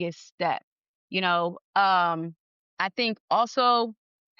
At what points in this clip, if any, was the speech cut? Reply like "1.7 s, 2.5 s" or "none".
none